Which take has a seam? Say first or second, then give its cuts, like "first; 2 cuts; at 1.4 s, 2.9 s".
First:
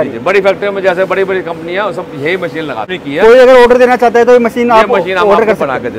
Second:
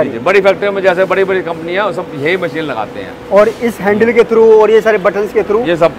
first; 1 cut; at 2.9 s